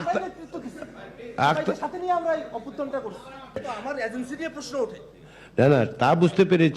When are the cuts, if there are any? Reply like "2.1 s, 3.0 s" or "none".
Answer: 3.7 s